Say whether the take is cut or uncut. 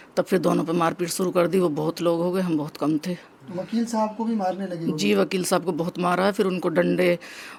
uncut